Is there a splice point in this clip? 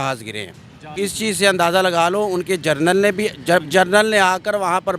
yes; 1 cut; at 0.9 s

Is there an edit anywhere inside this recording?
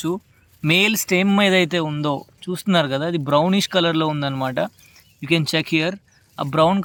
no; 0 cuts

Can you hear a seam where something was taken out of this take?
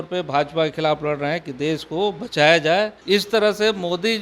yes; 1 cut; at 3.0 s

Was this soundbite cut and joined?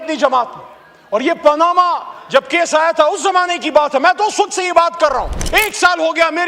yes; 1 cut; at 5.4 s

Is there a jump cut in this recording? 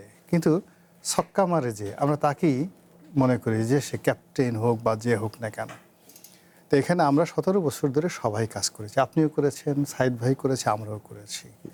no; 0 cuts

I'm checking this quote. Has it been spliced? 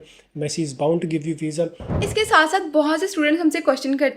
yes; 1 cut; at 1.9 s

